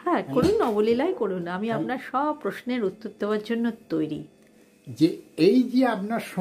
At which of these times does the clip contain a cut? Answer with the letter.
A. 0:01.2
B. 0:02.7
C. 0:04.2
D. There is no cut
C